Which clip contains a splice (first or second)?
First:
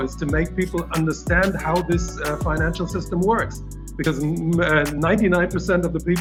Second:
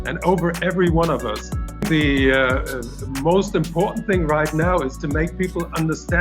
second